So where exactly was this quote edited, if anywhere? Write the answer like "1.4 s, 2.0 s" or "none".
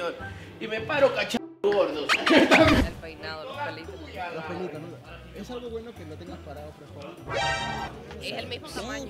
2.8 s